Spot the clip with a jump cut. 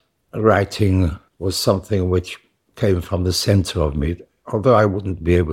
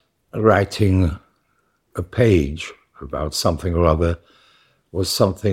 first; 1 cut; at 1.3 s

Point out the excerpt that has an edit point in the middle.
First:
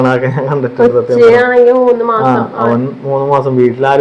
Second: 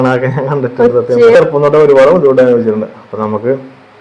second; 1 cut; at 1.4 s

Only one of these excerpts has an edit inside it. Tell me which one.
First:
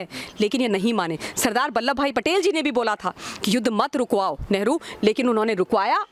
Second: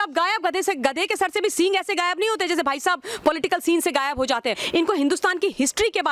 second; 1 cut; at 4.6 s

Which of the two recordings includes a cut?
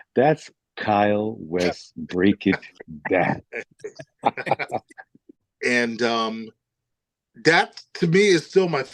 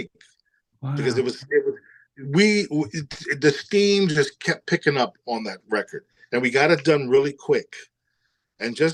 first; 1 cut; at 5.4 s

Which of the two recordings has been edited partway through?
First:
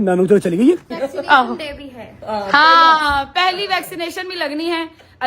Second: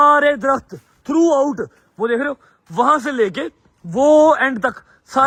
first; 1 cut; at 1.0 s

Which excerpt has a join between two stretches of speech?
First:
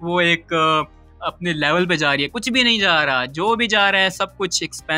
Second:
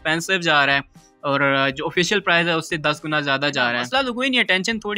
second; 1 cut; at 3.8 s

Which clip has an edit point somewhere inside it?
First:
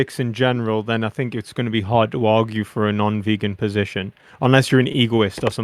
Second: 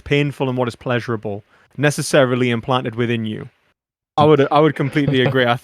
second; 1 cut; at 4.1 s

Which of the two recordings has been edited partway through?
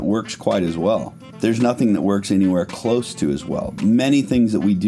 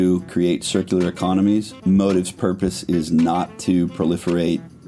first; 1 cut; at 1.2 s

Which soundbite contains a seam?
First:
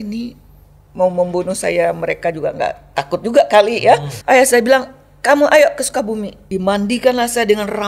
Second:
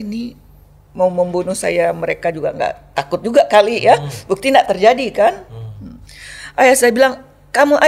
first; 2 cuts; at 4.1 s, 6.3 s

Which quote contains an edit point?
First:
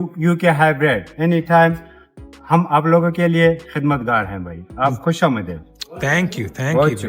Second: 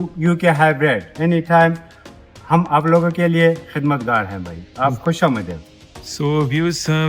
second; 1 cut; at 5.9 s

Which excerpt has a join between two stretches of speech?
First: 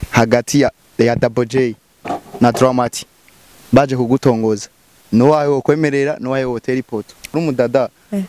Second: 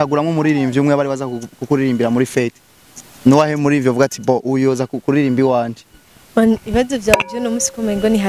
first; 1 cut; at 7.3 s

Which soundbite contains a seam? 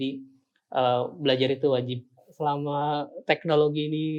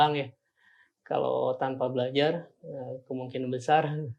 first; 1 cut; at 2.3 s

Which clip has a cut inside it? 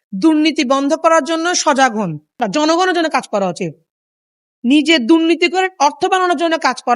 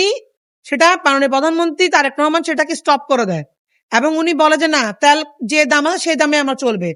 first; 1 cut; at 2.5 s

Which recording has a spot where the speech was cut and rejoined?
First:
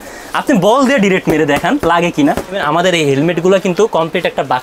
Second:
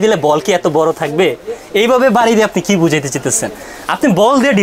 first; 1 cut; at 2.6 s

